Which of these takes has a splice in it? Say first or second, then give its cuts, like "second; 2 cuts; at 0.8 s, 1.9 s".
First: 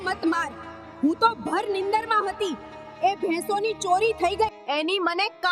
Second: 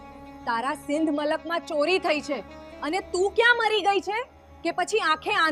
first; 1 cut; at 4.6 s